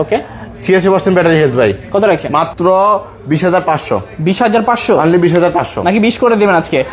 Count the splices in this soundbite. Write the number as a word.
one